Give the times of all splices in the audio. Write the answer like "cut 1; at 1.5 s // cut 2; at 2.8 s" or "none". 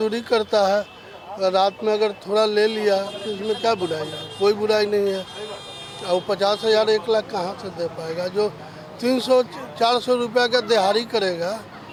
none